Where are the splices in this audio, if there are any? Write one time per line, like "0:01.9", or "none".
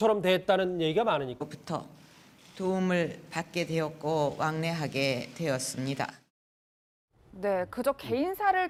none